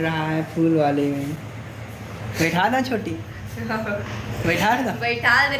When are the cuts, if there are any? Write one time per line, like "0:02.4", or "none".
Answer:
none